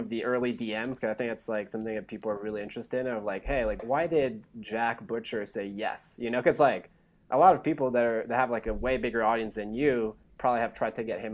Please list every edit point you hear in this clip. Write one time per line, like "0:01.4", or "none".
0:03.8
0:10.4